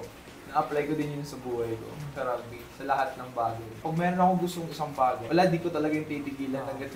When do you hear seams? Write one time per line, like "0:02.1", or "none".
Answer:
0:02.1
0:03.8
0:05.2